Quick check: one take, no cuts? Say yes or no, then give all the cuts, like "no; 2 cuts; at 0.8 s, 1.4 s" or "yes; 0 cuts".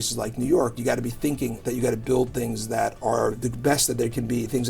no; 1 cut; at 1.6 s